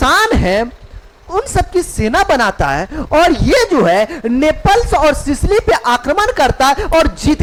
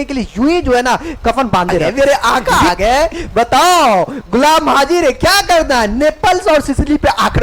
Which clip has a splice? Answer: second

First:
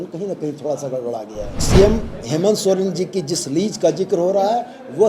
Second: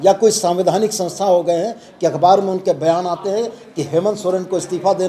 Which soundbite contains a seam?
first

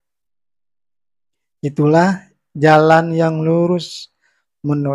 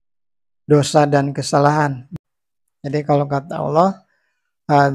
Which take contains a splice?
second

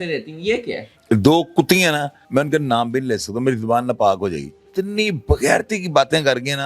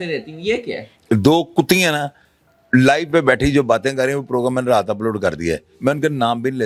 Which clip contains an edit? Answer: first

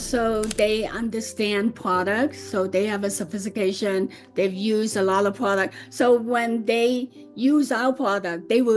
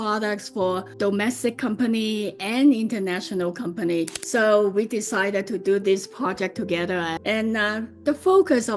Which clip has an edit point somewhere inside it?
second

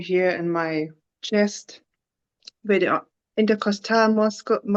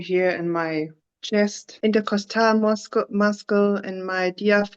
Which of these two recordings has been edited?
second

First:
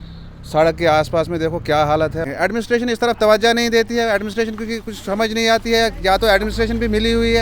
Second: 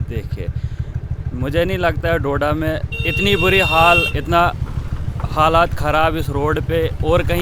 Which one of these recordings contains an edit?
first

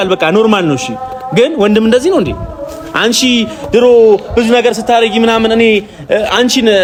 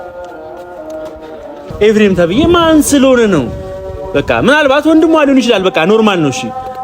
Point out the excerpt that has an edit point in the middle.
second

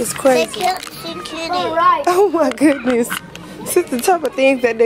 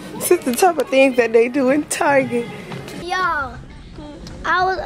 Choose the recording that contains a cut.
second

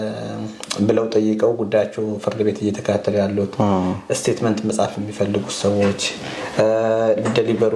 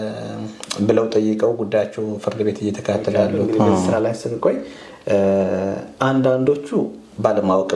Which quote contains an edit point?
second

